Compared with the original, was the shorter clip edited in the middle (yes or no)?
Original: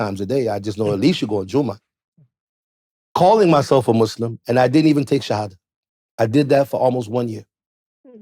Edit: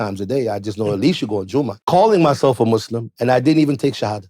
yes